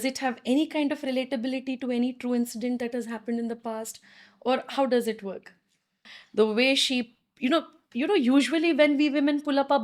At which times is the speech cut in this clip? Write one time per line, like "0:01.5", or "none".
0:06.1